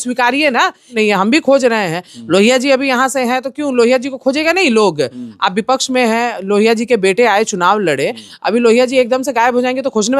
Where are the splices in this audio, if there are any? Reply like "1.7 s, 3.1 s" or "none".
0.9 s